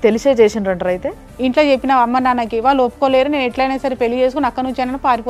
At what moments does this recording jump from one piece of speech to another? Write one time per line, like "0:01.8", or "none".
0:01.2